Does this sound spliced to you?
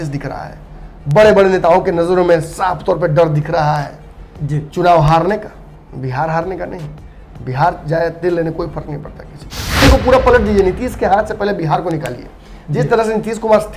yes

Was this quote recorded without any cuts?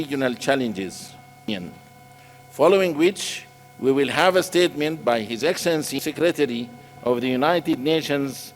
no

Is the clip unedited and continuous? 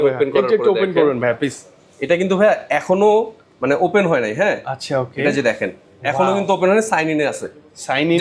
yes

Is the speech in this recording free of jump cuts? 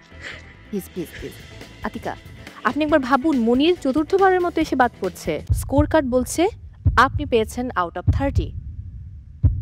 no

